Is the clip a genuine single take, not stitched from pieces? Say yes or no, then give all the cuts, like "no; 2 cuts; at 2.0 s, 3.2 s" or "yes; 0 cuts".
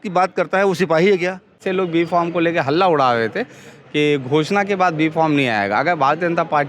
no; 1 cut; at 1.6 s